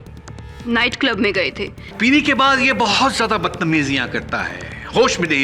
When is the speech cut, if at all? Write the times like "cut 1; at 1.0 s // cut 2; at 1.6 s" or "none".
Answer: cut 1; at 1.9 s